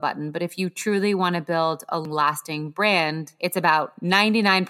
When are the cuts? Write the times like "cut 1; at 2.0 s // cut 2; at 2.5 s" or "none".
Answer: cut 1; at 2.0 s